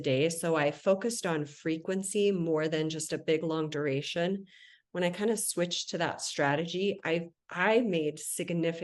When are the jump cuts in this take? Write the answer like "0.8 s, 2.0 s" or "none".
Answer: none